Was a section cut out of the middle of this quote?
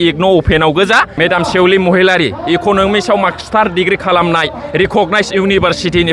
yes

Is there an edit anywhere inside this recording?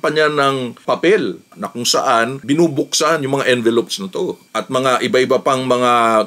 yes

